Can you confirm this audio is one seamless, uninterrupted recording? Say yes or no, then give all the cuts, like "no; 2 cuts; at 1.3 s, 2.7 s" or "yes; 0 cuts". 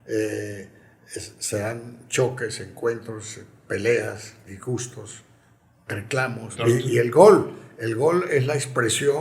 no; 1 cut; at 6.4 s